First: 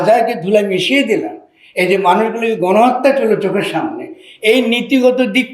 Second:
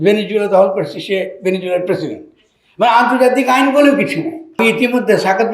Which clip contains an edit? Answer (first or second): second